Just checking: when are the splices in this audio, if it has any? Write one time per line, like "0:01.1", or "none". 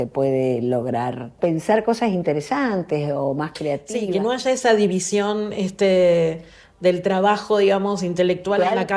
0:01.3